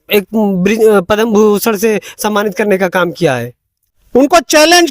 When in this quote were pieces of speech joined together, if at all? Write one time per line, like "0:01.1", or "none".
0:03.9